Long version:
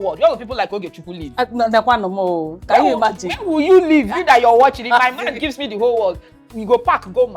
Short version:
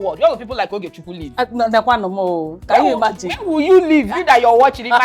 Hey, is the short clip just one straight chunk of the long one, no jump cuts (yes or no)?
yes